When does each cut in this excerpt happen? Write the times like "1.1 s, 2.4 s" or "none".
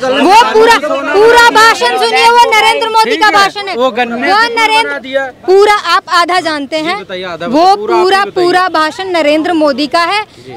none